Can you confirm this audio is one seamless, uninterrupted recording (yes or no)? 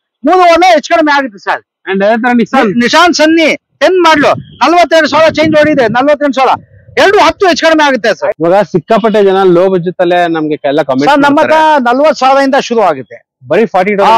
no